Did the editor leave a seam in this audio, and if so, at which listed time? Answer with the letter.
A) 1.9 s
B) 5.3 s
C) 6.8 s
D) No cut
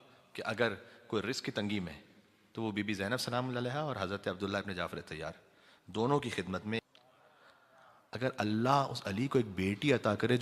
C